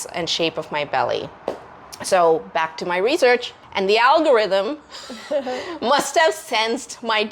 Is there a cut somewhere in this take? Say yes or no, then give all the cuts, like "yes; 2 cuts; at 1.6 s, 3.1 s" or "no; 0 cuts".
no; 0 cuts